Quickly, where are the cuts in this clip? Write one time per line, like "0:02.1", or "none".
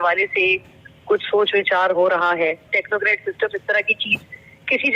0:02.7